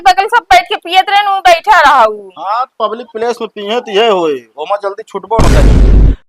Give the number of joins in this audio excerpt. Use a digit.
1